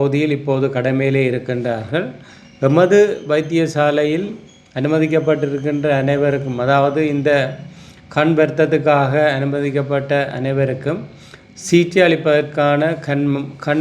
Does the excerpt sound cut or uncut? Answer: uncut